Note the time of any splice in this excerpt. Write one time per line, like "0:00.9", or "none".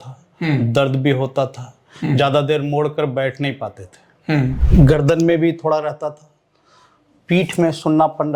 0:04.6